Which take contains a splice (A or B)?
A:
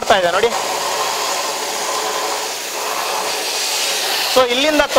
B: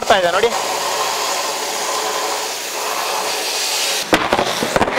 B